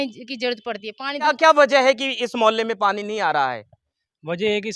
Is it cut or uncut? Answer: cut